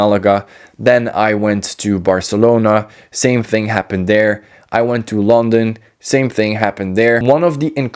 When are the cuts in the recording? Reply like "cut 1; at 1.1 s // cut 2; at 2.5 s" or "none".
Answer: none